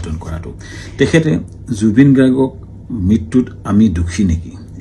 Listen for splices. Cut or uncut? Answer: cut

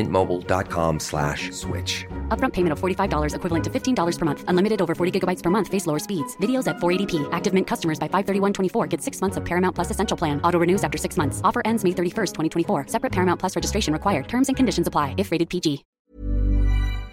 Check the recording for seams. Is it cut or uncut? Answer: cut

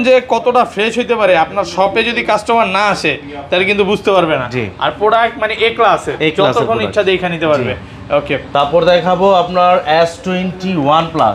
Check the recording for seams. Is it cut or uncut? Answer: uncut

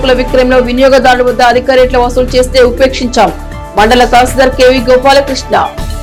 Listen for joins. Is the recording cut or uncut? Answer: uncut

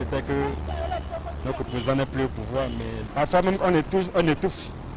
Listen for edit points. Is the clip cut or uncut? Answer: uncut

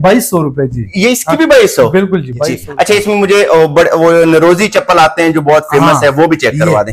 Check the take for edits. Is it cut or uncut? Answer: cut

